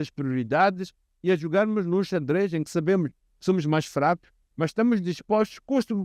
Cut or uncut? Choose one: uncut